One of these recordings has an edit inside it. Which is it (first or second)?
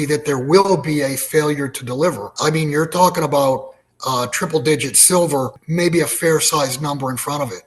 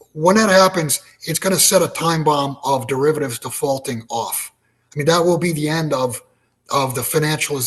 first